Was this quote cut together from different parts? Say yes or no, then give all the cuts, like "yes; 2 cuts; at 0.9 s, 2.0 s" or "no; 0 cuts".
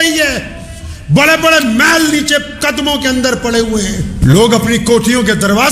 yes; 1 cut; at 4.2 s